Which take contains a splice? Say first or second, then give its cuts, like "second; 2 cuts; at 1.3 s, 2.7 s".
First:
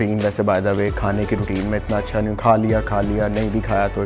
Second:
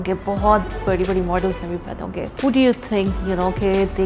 second; 1 cut; at 2.3 s